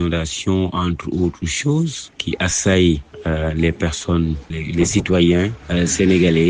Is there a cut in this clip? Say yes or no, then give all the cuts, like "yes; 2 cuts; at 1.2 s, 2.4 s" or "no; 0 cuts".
no; 0 cuts